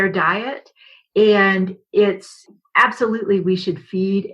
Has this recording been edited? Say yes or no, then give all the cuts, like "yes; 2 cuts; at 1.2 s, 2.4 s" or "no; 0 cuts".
yes; 1 cut; at 2.3 s